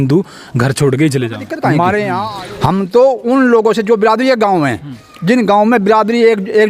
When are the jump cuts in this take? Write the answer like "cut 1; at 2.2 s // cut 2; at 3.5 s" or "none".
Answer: cut 1; at 2.3 s